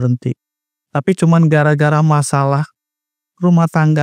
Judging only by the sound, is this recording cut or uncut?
uncut